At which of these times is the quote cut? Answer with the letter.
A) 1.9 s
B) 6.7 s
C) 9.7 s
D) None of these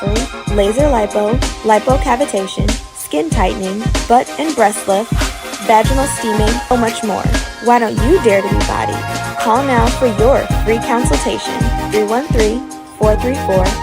B